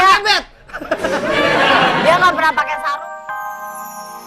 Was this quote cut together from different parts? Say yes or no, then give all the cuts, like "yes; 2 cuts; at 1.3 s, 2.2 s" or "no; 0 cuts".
yes; 1 cut; at 2.8 s